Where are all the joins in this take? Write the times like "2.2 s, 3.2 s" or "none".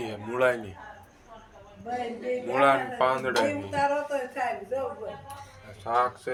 none